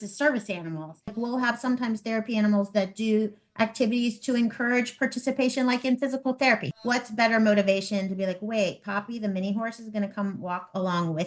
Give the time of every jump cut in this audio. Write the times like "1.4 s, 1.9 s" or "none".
1.2 s, 6.7 s